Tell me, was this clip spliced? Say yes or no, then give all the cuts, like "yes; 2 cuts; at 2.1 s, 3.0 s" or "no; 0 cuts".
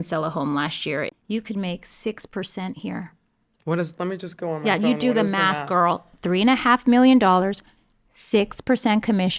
yes; 1 cut; at 1.1 s